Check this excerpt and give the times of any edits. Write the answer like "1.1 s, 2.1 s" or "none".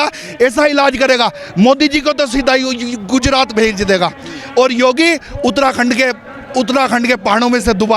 none